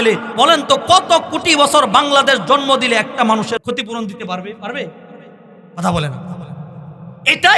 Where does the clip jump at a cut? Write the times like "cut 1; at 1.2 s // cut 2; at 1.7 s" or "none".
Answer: cut 1; at 3.6 s